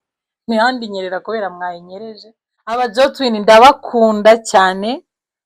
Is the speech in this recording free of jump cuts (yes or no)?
no